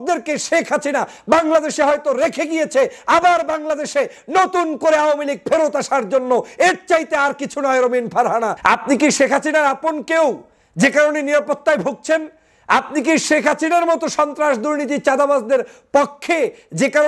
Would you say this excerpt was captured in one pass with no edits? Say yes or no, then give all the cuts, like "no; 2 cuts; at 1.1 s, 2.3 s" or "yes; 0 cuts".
no; 1 cut; at 8.6 s